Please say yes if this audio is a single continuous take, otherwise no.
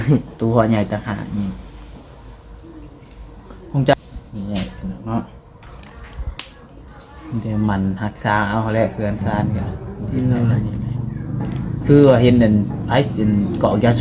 no